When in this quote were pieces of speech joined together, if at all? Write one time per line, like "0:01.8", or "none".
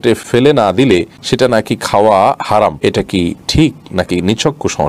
0:01.2
0:03.3